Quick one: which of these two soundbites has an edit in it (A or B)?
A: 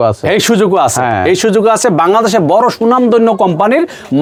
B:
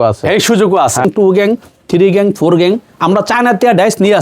B